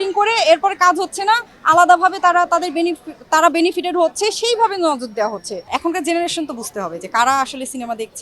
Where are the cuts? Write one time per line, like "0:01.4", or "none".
0:05.6